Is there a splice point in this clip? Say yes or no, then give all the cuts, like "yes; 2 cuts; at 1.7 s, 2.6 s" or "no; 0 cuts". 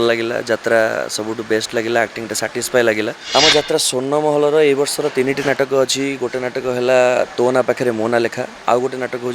yes; 1 cut; at 3.2 s